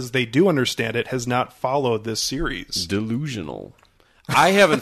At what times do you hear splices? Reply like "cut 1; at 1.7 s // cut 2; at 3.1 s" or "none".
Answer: none